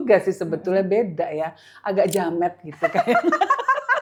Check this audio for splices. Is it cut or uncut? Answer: uncut